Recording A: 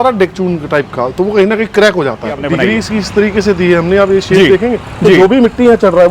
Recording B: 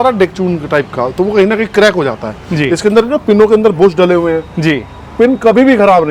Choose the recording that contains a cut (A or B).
A